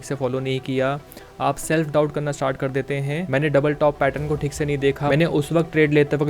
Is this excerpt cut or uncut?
cut